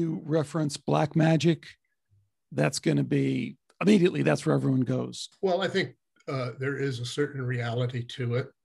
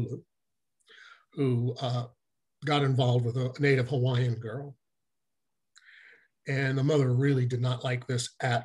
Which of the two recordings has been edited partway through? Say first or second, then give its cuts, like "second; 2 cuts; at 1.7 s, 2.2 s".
first; 1 cut; at 5.2 s